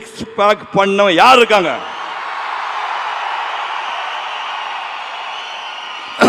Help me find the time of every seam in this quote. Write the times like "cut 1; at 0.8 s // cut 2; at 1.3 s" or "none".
none